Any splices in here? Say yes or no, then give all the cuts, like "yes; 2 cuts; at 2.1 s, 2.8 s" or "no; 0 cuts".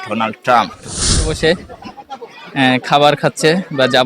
yes; 1 cut; at 1.3 s